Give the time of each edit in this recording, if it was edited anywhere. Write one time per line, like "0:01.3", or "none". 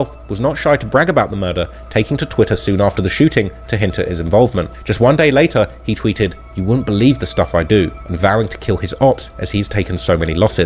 none

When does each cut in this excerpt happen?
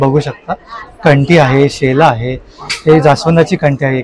none

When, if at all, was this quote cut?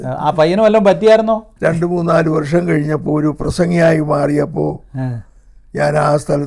0:01.5

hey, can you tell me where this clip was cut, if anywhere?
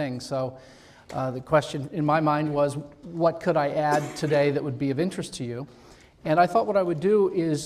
none

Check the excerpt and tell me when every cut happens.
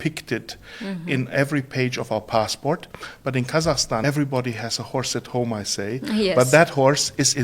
0:04.0

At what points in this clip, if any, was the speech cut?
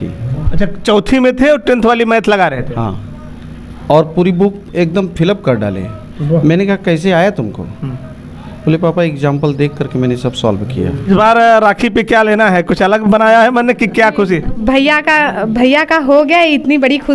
0:11.1

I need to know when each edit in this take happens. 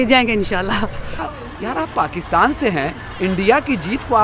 0:01.1

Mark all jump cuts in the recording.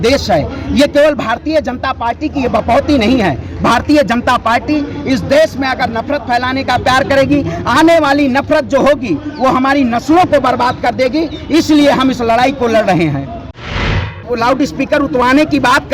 0:14.0

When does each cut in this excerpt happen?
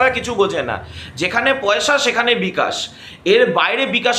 none

